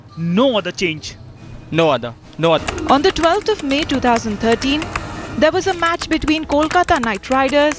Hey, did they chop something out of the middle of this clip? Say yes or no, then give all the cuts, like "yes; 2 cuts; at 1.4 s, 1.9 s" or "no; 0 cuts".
yes; 1 cut; at 2.6 s